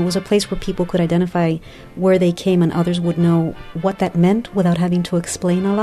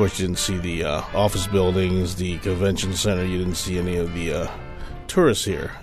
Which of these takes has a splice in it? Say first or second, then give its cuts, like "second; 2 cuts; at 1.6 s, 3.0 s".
first; 1 cut; at 3.6 s